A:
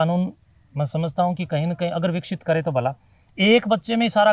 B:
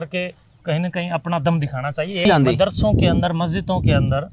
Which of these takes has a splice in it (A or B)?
B